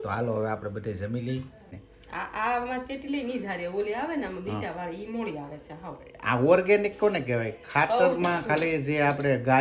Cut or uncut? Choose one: cut